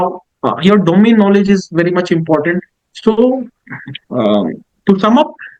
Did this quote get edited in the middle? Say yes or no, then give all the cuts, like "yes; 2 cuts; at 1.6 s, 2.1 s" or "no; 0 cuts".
no; 0 cuts